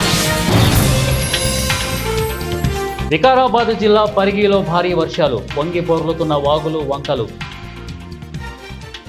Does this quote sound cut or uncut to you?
cut